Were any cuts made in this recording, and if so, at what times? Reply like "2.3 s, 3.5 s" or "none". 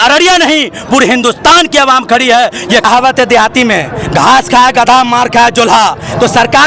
2.9 s

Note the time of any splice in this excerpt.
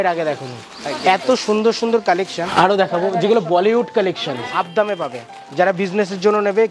2.5 s, 4.5 s

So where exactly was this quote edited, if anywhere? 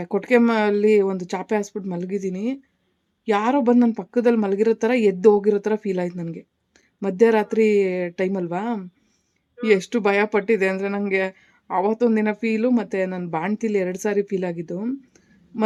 none

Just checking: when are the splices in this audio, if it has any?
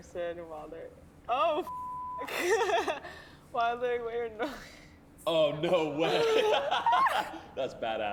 none

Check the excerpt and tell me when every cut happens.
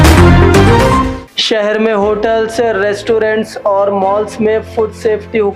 1.2 s

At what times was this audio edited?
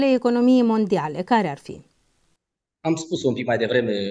none

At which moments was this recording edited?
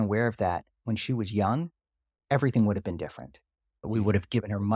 3.9 s

